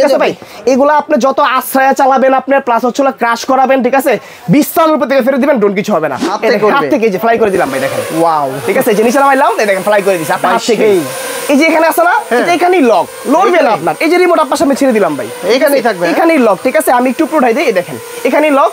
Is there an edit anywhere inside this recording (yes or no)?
yes